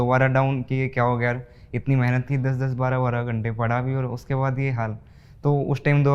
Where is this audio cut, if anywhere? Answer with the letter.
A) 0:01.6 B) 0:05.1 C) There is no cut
C